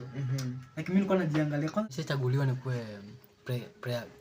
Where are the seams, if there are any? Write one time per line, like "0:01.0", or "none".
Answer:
0:01.9